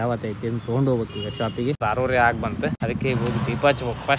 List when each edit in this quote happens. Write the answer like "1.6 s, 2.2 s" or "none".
1.8 s, 2.8 s